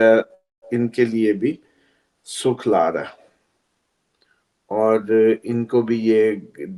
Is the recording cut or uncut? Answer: uncut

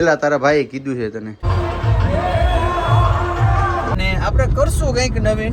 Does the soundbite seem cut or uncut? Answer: cut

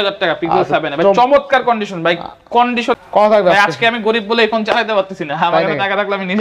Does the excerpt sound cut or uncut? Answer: cut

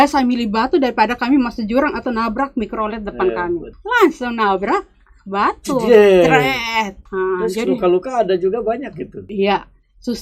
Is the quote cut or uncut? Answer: cut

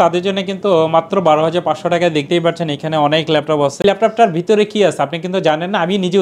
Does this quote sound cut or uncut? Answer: cut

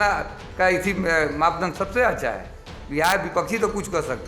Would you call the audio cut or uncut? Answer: uncut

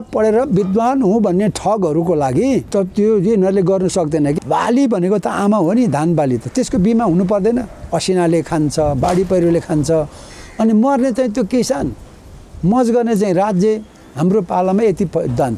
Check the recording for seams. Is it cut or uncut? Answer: cut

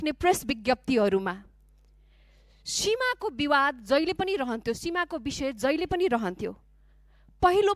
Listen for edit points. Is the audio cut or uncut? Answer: uncut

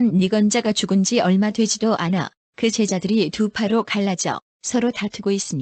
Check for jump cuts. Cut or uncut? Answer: uncut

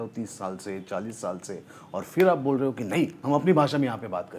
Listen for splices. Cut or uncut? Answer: cut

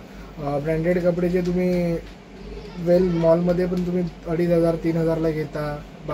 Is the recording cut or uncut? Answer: uncut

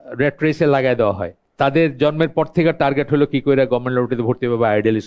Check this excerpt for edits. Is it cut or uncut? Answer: cut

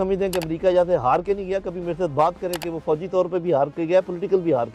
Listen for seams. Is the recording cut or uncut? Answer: uncut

